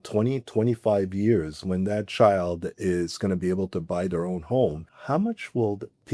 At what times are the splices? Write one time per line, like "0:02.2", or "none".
0:04.9